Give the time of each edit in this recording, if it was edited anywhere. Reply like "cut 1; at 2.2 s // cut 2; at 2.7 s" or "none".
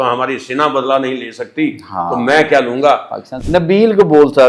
cut 1; at 3.2 s

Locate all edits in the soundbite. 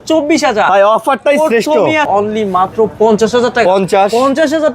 cut 1; at 2.1 s

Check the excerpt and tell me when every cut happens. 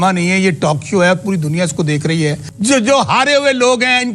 cut 1; at 2.5 s

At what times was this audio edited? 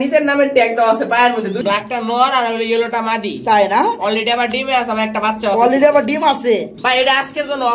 cut 1; at 1.6 s // cut 2; at 6.8 s

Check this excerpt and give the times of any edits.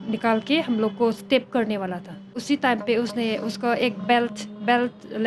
cut 1; at 2.4 s

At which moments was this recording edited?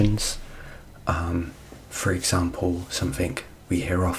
none

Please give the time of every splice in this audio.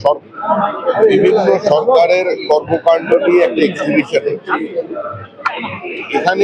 none

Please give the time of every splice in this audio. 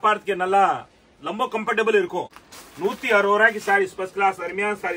cut 1; at 2.4 s

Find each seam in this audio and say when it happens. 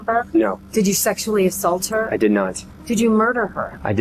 cut 1; at 2.7 s

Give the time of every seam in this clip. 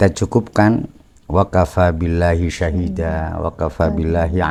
none

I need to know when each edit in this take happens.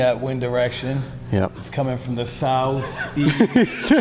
none

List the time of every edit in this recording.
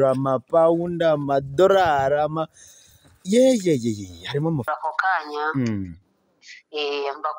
cut 1; at 4.7 s

